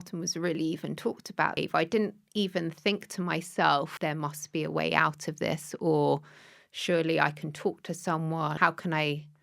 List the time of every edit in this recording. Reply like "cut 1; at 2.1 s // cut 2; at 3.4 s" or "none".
cut 1; at 1.6 s // cut 2; at 3.9 s // cut 3; at 8.6 s

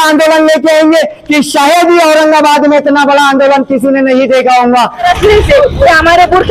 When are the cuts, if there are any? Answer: cut 1; at 5.0 s

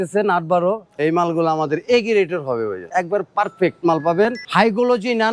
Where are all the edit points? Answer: cut 1; at 1.0 s // cut 2; at 2.8 s // cut 3; at 4.4 s

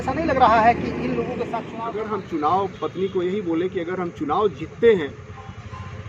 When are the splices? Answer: cut 1; at 1.6 s

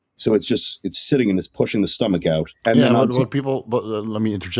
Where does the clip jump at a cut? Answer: cut 1; at 2.5 s

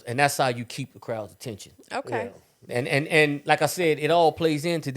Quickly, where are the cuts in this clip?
none

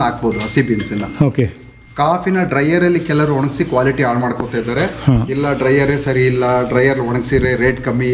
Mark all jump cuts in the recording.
none

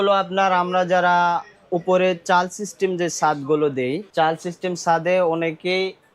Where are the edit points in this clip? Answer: cut 1; at 4.1 s

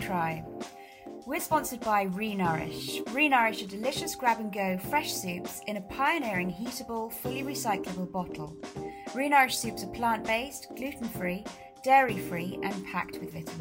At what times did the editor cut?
none

